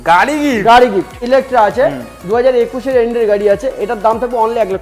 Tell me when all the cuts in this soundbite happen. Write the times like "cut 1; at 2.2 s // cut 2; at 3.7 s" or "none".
cut 1; at 1.2 s